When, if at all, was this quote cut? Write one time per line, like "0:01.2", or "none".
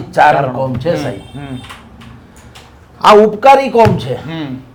none